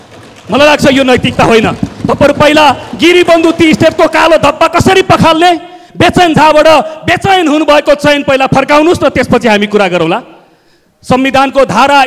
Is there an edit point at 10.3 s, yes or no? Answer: no